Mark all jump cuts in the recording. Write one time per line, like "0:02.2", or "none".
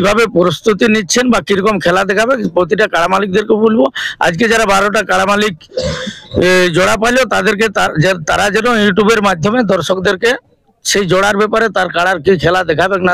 none